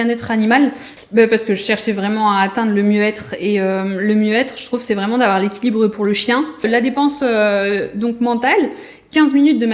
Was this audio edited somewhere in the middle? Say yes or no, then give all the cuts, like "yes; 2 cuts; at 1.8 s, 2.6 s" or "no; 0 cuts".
yes; 2 cuts; at 0.9 s, 6.7 s